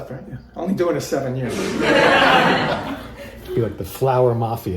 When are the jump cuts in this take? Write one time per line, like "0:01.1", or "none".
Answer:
0:02.8